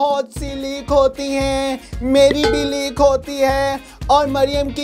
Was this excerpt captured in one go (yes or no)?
yes